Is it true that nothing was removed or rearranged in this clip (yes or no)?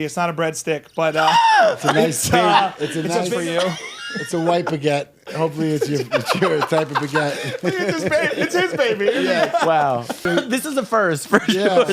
no